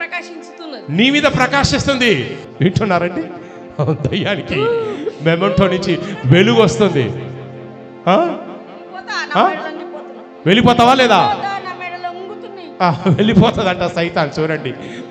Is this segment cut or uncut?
cut